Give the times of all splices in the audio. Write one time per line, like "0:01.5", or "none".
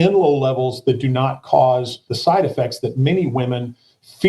0:02.0